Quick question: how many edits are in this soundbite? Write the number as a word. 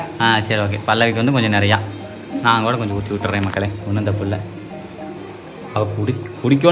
zero